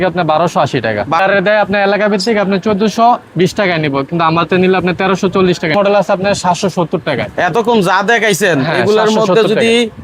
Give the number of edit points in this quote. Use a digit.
2